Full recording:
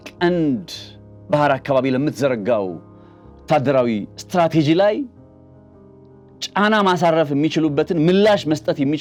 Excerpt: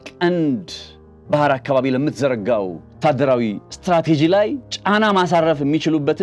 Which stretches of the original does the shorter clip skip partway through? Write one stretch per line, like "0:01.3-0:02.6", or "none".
0:02.8-0:03.3
0:05.1-0:06.4